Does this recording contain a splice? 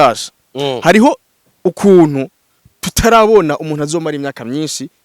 no; 0 cuts

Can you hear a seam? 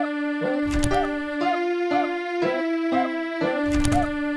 yes; 2 cuts; at 2.3 s, 3.4 s

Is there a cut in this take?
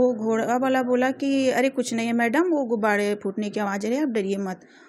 no; 0 cuts

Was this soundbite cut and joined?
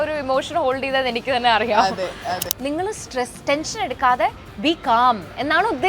yes; 1 cut; at 2.4 s

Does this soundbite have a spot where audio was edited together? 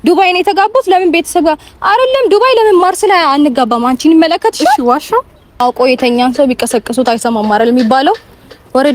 yes; 1 cut; at 5.6 s

